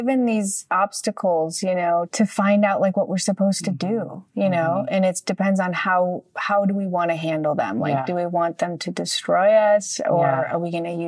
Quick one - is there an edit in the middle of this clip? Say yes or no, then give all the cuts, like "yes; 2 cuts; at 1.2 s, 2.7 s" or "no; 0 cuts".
yes; 1 cut; at 2.1 s